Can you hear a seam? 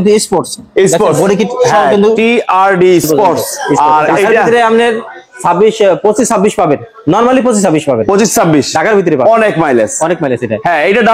yes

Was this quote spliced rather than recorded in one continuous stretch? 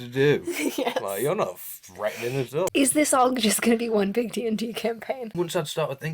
yes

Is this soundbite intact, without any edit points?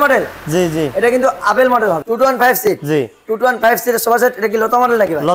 no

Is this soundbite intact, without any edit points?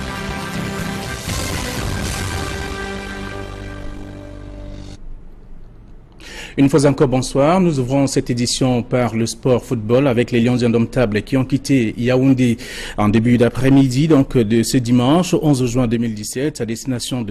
no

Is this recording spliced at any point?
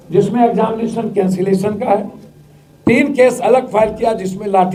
no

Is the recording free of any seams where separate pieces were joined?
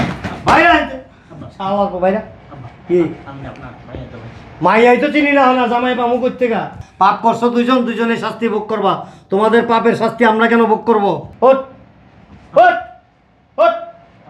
no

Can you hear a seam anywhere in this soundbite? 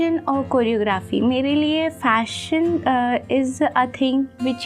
no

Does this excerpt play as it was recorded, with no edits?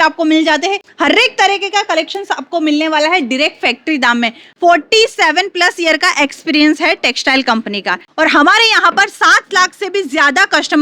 no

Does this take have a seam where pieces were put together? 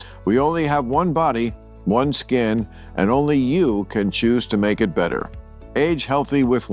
no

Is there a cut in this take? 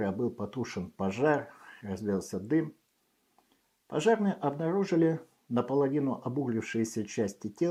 no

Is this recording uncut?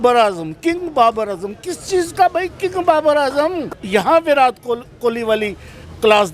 no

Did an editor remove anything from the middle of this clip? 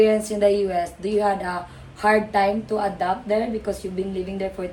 no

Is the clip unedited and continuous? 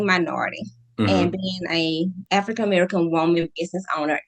no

